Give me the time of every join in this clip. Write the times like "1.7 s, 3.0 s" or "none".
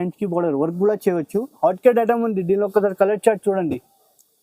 1.5 s